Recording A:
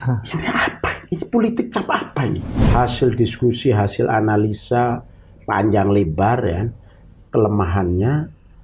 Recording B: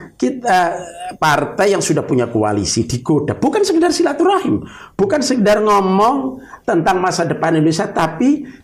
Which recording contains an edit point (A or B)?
A